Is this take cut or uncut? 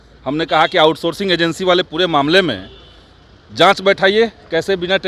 uncut